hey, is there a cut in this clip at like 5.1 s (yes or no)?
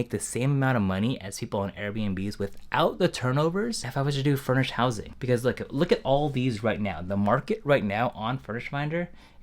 yes